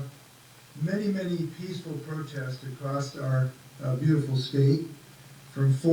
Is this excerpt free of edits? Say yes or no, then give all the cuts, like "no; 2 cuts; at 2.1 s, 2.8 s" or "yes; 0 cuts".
yes; 0 cuts